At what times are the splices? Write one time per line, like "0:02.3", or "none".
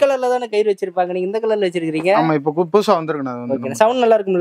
none